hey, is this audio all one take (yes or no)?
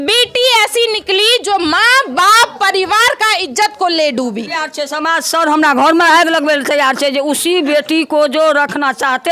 no